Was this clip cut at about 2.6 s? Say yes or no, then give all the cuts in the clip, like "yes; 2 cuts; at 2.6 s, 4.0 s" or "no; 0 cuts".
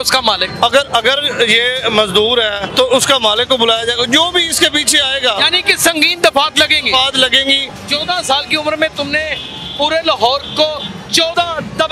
yes; 3 cuts; at 2.6 s, 7.6 s, 11.0 s